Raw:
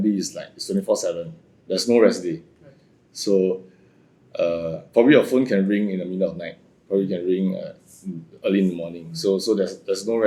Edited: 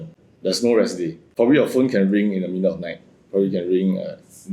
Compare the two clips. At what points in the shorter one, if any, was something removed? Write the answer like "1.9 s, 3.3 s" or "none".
1.2 s